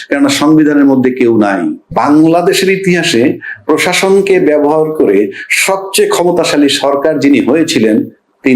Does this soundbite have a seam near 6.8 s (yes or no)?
no